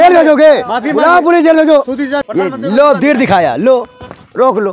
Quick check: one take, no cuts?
yes; 0 cuts

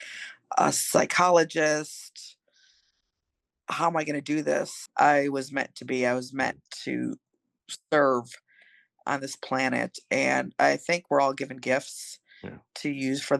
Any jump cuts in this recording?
yes; 1 cut; at 4.8 s

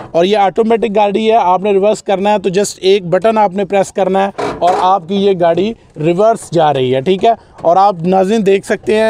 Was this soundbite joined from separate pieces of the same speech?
no; 0 cuts

